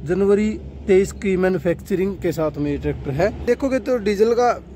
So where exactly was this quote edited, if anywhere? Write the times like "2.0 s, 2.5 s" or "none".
3.4 s

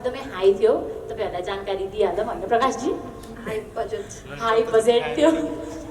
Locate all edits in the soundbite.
none

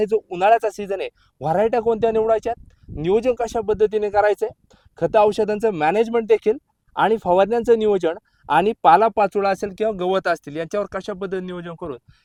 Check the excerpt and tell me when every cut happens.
none

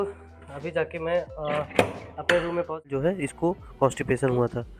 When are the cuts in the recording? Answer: 2.9 s

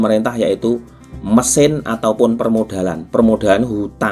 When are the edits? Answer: none

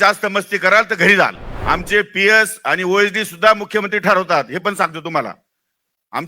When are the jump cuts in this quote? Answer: 1.5 s

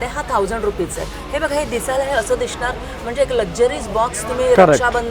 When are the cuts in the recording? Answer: none

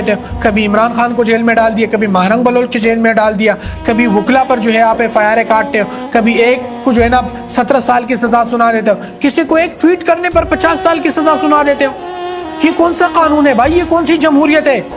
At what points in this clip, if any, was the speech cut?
13.9 s

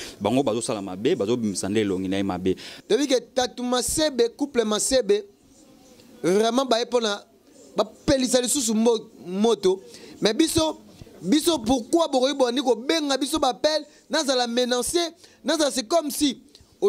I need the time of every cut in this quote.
2.7 s

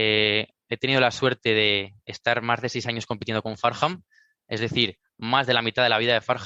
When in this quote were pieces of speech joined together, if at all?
none

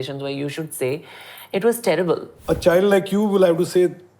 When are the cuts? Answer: 2.3 s

